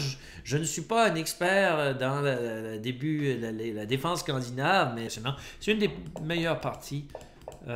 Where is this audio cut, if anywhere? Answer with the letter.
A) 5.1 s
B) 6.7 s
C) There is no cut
A